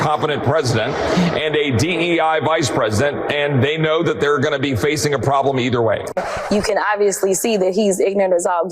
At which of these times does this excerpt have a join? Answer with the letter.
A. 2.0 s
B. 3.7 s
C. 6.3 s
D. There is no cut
C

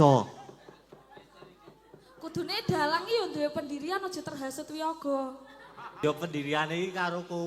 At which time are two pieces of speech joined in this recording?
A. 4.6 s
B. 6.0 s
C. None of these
B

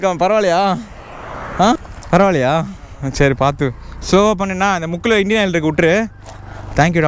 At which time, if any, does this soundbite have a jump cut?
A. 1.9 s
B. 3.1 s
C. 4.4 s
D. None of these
A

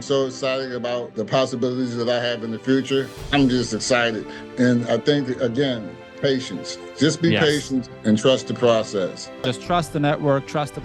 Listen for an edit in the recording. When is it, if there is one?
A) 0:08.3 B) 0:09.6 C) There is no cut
B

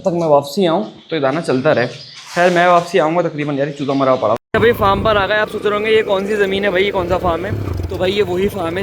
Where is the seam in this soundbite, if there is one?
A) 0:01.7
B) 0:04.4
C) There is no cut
B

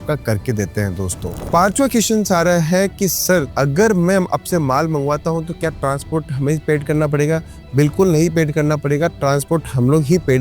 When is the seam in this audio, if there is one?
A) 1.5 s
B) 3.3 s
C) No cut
A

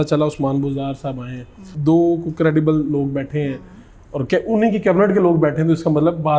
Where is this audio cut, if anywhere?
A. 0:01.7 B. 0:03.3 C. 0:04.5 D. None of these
A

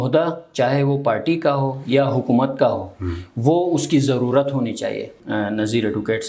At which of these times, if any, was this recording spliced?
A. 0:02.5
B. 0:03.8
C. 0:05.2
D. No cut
C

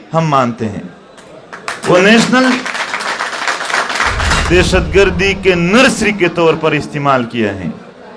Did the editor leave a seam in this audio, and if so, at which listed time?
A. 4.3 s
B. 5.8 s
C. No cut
A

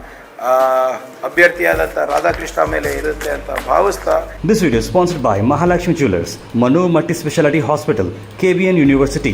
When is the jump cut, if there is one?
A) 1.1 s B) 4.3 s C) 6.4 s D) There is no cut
B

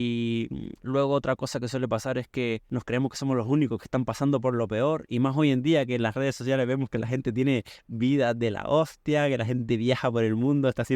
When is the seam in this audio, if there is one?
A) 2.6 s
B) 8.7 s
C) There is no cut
A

